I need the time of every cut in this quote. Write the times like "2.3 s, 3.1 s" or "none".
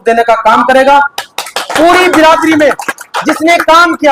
none